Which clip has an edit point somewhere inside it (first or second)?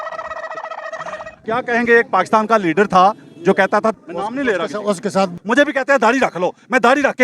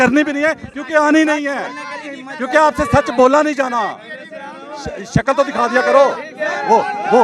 first